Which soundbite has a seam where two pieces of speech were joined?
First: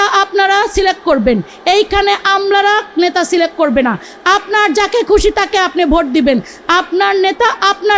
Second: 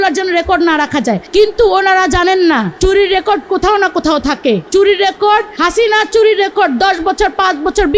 second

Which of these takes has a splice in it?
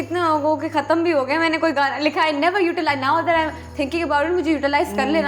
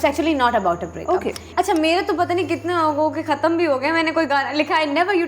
second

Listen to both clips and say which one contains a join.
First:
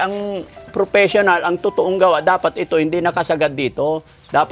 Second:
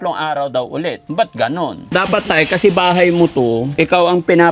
second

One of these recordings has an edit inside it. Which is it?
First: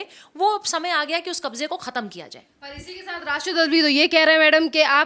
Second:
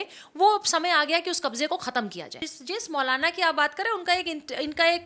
second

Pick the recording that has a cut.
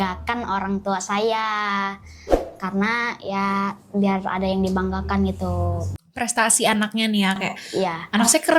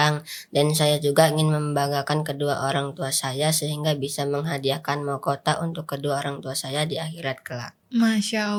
first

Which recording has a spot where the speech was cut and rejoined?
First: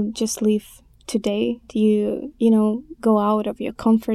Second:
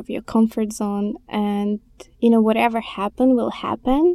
first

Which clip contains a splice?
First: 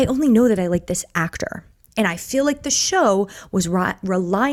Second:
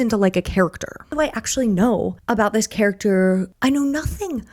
second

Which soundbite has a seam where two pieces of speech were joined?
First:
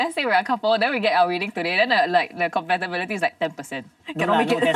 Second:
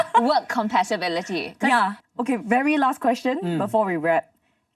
second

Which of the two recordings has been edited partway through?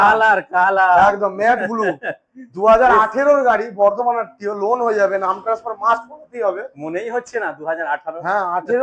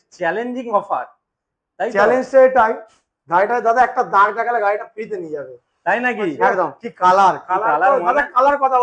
second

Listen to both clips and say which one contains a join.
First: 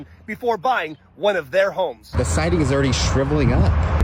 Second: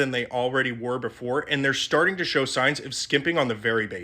first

